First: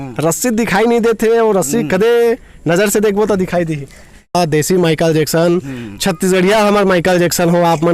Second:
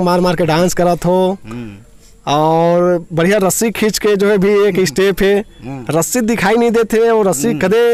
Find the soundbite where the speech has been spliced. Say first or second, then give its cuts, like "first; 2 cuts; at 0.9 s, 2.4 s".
first; 1 cut; at 4.3 s